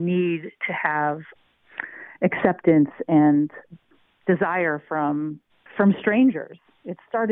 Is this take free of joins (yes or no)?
no